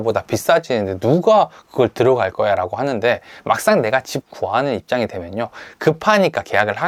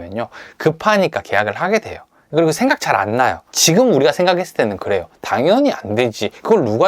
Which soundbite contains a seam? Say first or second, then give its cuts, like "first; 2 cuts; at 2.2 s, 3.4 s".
second; 1 cut; at 3.5 s